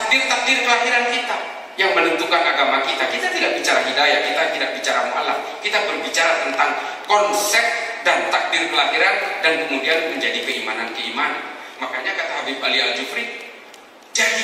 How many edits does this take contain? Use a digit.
0